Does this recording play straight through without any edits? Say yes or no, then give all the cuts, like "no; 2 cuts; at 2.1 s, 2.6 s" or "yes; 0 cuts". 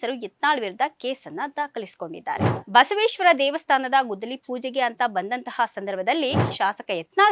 no; 2 cuts; at 2.5 s, 6.5 s